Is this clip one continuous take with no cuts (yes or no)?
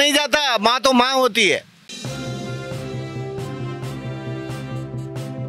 yes